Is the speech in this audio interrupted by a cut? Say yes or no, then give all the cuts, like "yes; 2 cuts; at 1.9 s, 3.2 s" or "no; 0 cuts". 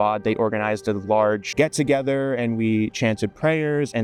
no; 0 cuts